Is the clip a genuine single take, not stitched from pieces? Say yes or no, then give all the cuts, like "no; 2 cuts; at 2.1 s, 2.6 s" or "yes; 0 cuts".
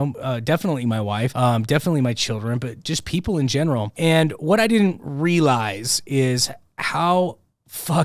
no; 2 cuts; at 1.3 s, 3.9 s